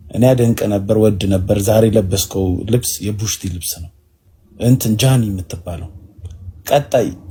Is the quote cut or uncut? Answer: uncut